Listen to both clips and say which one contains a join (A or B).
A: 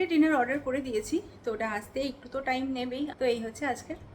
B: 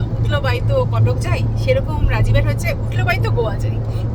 A